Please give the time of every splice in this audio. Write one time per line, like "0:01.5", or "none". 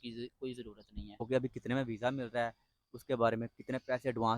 0:01.3